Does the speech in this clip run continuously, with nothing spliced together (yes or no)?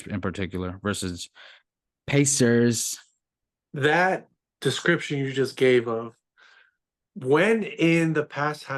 yes